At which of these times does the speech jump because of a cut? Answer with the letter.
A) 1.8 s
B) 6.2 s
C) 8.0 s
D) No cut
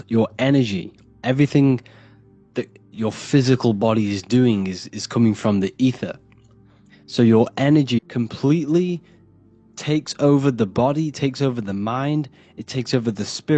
C